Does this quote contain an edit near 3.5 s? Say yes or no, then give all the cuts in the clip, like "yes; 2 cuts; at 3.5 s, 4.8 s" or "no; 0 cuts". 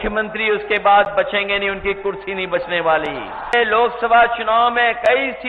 yes; 1 cut; at 3.5 s